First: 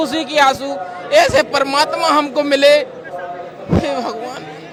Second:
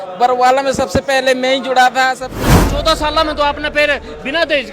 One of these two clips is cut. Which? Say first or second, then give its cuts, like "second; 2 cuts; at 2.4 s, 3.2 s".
second; 1 cut; at 2.4 s